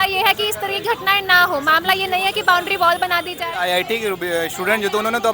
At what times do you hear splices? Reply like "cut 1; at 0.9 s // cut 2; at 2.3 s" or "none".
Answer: cut 1; at 3.3 s